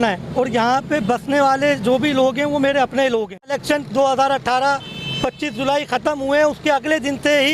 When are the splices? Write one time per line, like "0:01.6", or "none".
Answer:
0:03.6

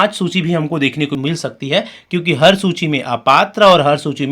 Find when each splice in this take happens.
0:01.2

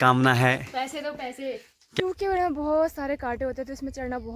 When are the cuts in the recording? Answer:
0:02.0

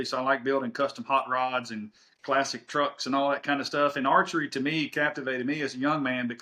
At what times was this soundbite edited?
none

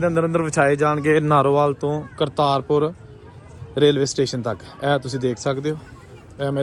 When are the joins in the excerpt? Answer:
none

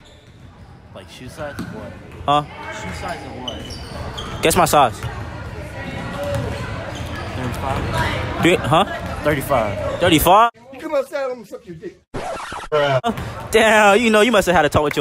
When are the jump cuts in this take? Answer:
none

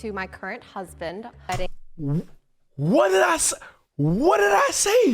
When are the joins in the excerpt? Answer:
0:01.5

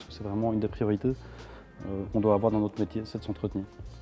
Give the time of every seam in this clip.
none

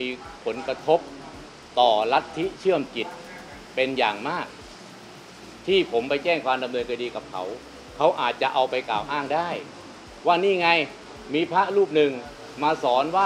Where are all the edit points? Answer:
none

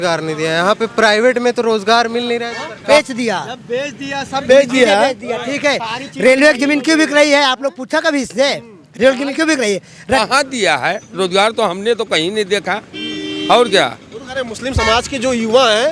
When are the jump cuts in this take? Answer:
0:02.8
0:10.2

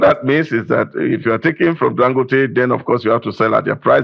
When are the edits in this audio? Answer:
none

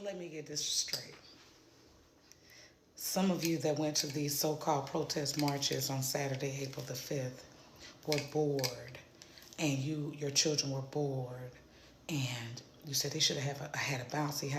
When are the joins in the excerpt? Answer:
none

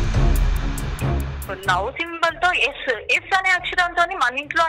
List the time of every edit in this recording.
0:01.4

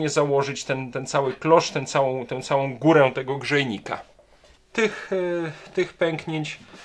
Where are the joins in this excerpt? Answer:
0:04.6

